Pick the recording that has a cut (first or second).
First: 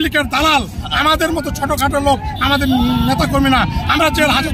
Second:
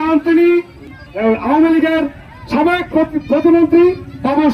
second